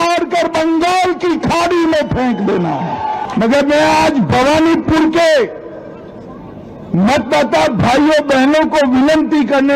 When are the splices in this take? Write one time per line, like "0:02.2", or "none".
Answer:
0:03.2